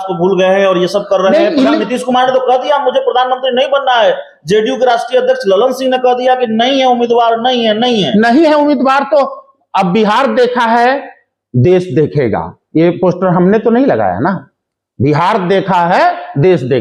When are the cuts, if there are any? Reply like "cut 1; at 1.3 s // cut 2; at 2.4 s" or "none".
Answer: none